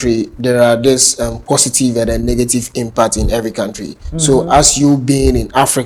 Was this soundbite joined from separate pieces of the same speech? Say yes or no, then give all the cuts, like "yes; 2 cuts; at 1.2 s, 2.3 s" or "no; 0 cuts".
no; 0 cuts